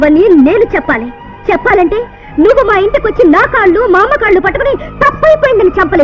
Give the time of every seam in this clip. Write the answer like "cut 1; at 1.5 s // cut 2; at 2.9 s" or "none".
none